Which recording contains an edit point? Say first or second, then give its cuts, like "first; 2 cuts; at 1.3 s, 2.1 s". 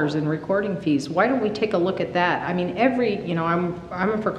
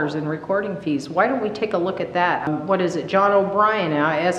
second; 1 cut; at 2.5 s